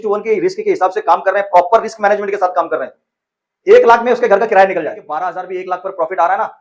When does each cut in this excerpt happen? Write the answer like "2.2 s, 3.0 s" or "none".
5.0 s